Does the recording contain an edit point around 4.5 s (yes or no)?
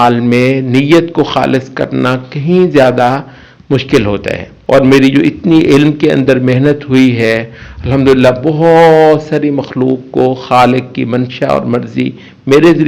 yes